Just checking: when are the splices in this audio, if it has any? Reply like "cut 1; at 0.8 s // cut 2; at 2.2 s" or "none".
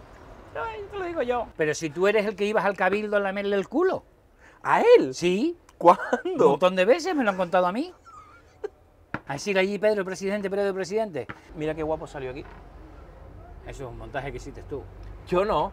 cut 1; at 1.5 s // cut 2; at 11.4 s